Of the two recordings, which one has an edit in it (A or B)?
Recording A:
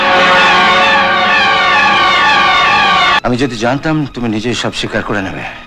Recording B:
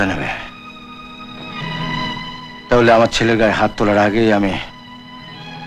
A